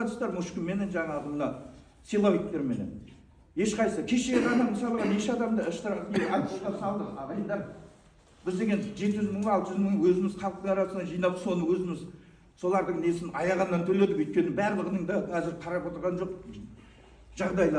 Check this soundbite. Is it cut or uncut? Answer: uncut